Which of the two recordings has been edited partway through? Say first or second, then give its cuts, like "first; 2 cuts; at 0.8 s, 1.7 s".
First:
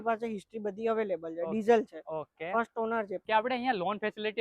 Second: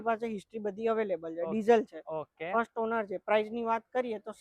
first; 1 cut; at 3.2 s